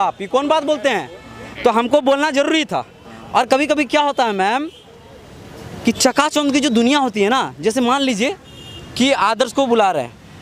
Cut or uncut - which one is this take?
uncut